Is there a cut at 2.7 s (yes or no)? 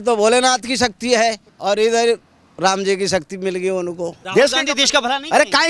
no